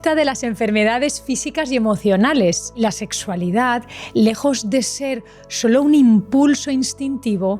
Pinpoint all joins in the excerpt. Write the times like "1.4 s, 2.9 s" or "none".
2.8 s